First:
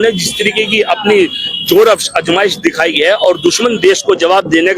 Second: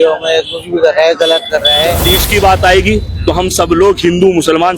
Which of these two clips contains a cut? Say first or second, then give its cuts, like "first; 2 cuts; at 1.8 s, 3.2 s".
second; 1 cut; at 2.1 s